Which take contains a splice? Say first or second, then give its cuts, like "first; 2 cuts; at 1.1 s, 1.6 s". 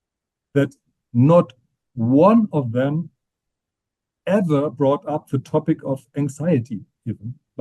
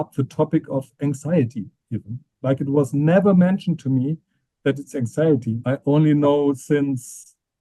second; 1 cut; at 5.6 s